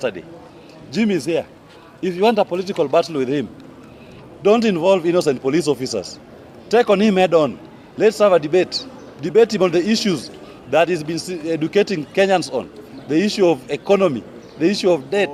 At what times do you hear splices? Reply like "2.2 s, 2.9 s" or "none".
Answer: none